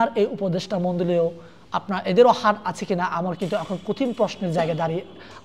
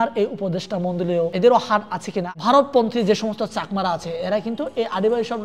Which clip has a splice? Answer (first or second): second